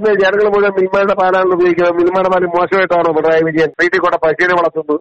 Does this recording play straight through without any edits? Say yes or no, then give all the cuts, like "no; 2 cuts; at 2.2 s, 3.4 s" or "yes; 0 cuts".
no; 1 cut; at 3.7 s